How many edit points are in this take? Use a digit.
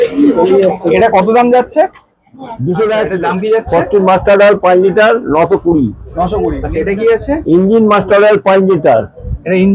2